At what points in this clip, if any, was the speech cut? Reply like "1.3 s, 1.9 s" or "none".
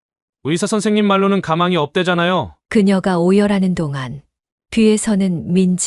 2.6 s

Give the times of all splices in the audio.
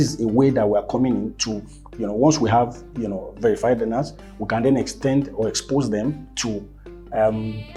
none

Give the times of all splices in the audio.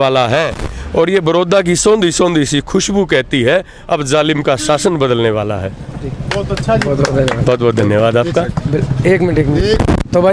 none

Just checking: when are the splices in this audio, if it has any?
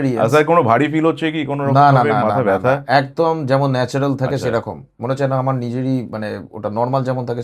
none

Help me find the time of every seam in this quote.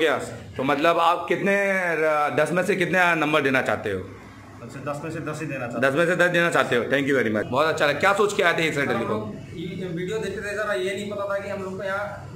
7.5 s

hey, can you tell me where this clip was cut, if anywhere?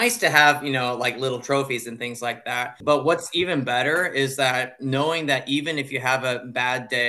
2.8 s

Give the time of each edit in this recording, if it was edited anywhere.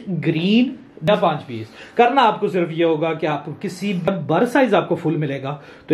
1.1 s, 4.1 s

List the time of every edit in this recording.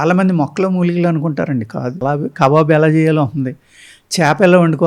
2.0 s

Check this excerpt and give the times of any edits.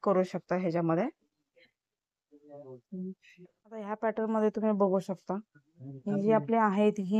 3.9 s

